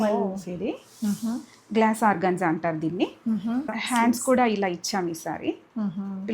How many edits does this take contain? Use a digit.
1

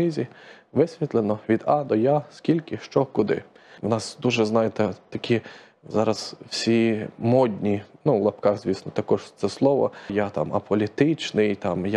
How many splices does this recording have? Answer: 2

